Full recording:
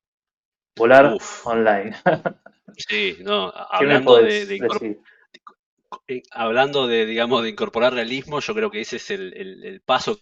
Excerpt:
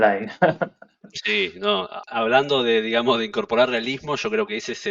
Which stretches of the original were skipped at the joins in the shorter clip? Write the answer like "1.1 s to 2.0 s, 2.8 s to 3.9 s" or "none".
3.7 s to 6.3 s